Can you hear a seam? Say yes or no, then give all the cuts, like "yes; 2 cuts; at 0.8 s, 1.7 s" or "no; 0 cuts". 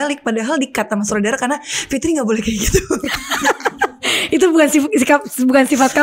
no; 0 cuts